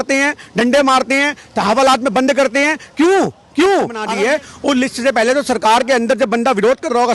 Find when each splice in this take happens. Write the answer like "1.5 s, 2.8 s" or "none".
4.0 s

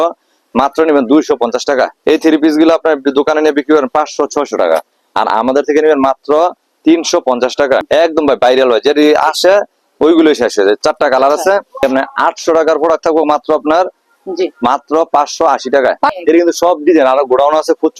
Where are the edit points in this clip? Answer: 1.9 s, 7.8 s, 11.8 s, 16.2 s

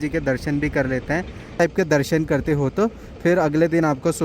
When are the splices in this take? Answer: 1.6 s

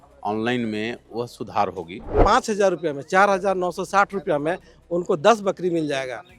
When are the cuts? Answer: 2.2 s

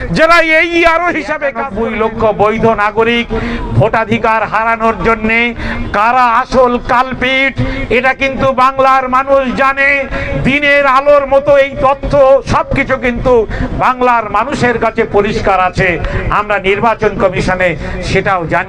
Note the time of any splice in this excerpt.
1.6 s

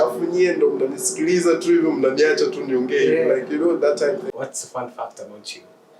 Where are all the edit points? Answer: 4.3 s

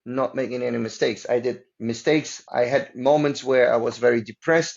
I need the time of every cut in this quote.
2.4 s

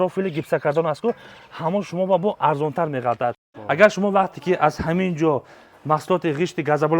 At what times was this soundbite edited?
3.5 s

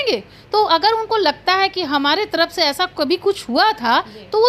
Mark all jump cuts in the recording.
none

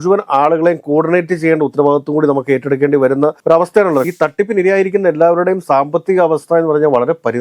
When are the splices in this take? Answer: 4.0 s

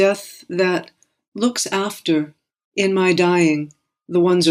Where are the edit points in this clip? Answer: none

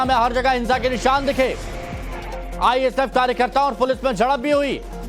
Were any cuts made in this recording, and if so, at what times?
none

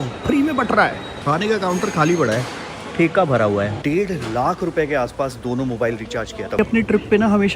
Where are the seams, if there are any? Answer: 1.1 s, 3.8 s, 6.6 s

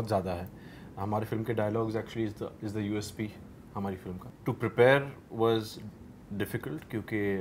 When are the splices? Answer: none

